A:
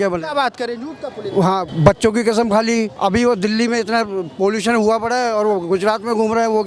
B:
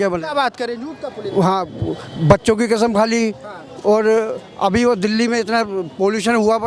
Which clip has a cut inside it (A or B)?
A